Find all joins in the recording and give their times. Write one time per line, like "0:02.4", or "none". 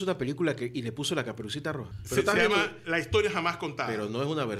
0:01.9